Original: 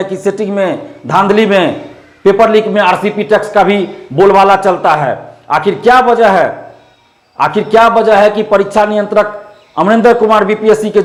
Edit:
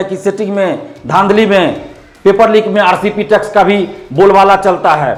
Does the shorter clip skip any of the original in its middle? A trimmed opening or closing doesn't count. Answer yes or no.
no